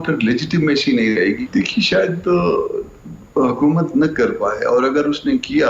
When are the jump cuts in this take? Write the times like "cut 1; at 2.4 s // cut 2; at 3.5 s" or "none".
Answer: cut 1; at 1.4 s